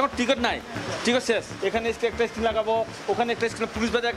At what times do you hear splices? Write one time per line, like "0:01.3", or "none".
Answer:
0:01.5